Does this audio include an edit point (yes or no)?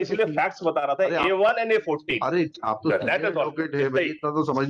no